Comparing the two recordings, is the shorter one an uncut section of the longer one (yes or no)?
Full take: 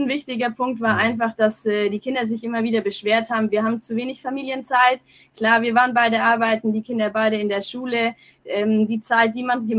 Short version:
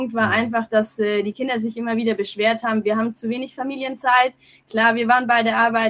yes